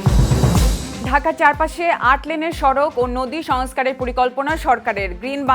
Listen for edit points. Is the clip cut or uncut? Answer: cut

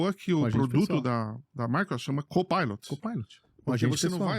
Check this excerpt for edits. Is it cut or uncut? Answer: cut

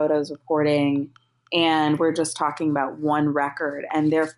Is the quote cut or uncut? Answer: uncut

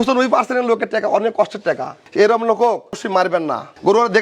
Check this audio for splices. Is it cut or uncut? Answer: cut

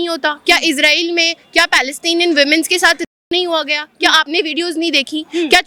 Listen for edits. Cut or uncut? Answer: uncut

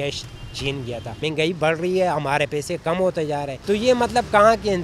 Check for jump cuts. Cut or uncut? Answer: cut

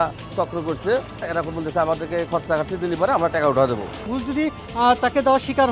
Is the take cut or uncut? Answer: cut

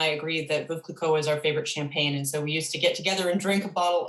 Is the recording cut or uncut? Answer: uncut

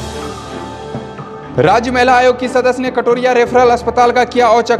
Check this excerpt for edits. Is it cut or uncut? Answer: cut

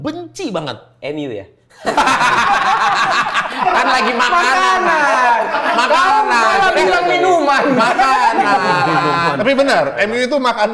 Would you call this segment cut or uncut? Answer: uncut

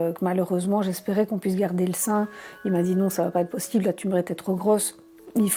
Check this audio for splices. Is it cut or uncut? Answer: uncut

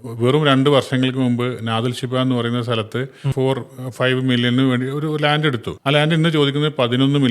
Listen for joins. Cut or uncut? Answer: cut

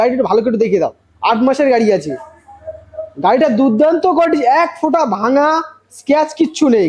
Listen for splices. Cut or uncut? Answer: uncut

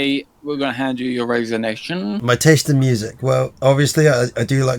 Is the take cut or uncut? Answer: cut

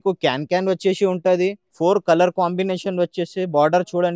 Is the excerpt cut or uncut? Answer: cut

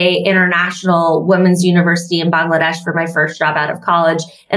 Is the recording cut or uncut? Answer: uncut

